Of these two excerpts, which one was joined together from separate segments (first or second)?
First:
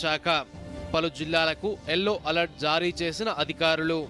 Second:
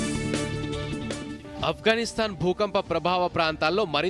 second